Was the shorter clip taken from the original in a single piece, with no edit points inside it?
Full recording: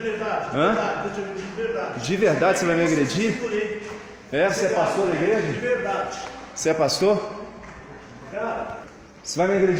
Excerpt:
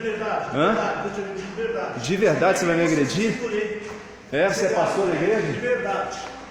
yes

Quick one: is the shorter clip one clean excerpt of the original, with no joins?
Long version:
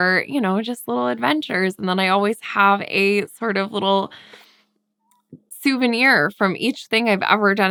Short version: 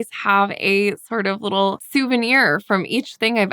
no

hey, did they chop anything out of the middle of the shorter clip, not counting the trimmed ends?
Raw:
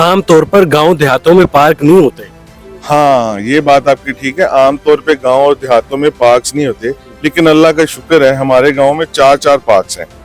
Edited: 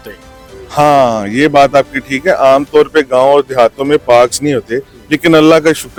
no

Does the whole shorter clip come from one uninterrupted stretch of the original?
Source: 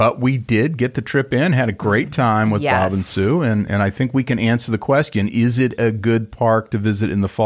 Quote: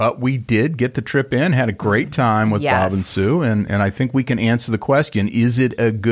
yes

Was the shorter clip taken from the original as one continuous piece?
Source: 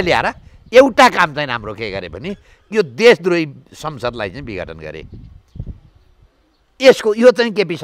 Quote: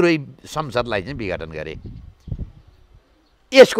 yes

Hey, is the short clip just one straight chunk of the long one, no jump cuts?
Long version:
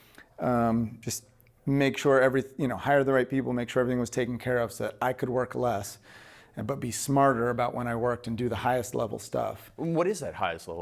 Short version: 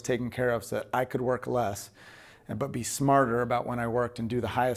yes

